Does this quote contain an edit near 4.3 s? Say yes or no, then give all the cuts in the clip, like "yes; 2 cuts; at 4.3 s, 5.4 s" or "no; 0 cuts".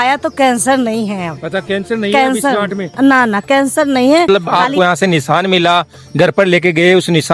yes; 1 cut; at 4.3 s